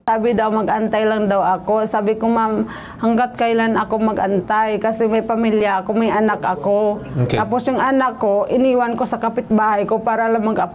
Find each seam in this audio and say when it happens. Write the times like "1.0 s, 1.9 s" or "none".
none